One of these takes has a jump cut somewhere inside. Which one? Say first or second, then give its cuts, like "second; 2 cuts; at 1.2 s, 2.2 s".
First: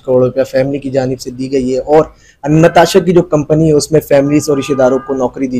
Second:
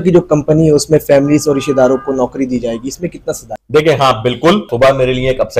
second; 2 cuts; at 3.5 s, 4.7 s